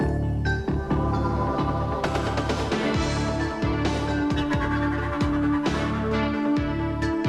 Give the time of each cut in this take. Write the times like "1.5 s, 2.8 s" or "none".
none